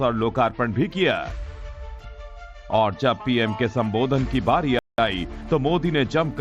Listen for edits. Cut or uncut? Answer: uncut